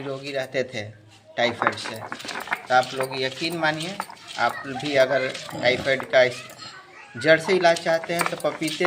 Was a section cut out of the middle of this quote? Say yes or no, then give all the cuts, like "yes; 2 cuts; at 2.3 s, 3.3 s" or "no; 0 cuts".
yes; 1 cut; at 2.5 s